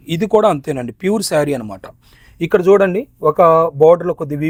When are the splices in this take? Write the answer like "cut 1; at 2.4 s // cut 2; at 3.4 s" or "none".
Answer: none